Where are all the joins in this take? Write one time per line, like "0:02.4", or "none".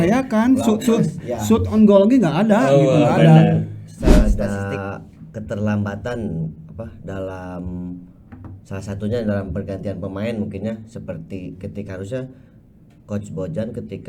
0:04.2